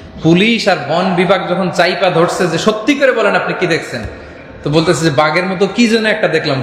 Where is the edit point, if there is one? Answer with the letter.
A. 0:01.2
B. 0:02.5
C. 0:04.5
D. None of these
D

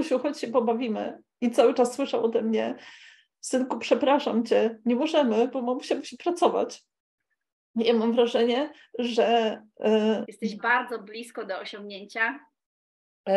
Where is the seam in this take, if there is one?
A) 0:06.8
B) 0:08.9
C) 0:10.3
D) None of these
C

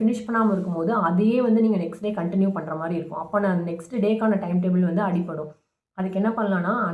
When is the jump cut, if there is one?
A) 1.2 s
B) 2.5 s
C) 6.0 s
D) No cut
D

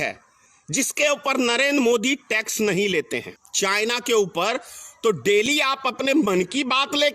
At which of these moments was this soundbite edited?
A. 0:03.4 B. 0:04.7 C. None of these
A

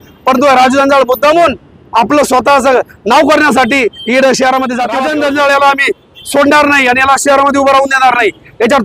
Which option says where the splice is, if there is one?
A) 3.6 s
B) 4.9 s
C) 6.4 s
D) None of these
B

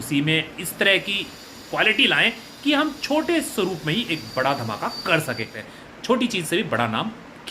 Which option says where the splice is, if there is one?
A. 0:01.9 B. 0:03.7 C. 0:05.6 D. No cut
C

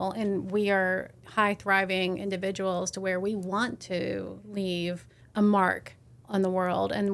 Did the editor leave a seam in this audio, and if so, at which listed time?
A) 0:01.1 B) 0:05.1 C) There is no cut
B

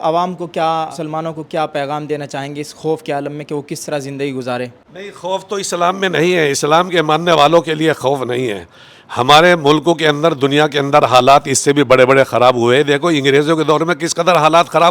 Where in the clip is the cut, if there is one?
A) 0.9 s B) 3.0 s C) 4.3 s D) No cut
A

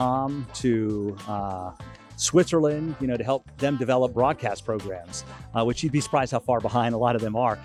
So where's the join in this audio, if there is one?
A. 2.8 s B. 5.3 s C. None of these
C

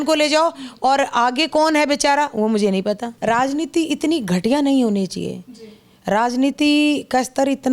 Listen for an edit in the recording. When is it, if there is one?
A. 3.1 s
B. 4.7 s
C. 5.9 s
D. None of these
A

